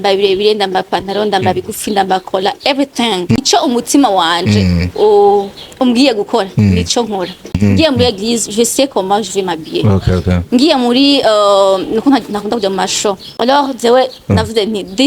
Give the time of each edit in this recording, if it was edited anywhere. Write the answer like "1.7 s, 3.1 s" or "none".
3.4 s, 7.6 s, 13.3 s